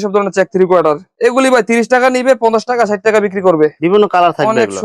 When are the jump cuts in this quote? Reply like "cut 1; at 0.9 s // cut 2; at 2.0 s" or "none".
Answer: none